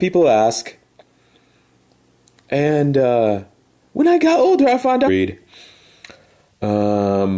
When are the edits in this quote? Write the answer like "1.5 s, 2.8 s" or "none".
none